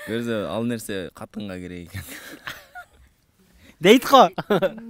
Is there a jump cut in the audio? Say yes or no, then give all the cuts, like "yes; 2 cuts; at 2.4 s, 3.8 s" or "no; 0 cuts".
no; 0 cuts